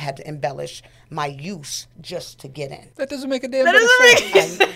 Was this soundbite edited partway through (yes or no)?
yes